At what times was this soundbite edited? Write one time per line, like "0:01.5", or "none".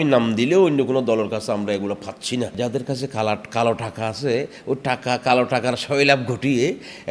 0:02.5